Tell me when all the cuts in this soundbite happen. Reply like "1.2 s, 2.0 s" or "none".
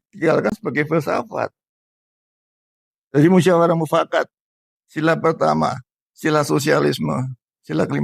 none